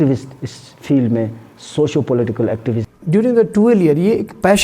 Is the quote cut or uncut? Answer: cut